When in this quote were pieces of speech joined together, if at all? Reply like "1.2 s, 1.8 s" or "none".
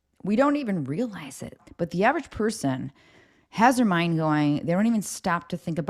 1.6 s